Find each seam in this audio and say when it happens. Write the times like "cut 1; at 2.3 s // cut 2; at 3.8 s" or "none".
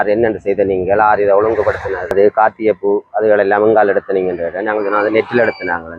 cut 1; at 2.1 s